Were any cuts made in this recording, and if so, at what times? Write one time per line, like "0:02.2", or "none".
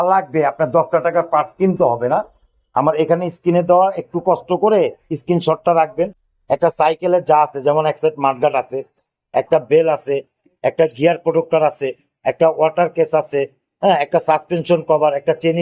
none